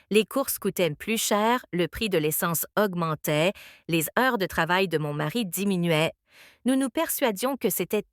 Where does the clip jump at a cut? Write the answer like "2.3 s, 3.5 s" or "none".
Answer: 1.0 s